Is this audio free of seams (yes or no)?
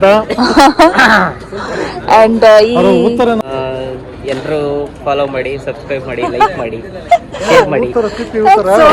no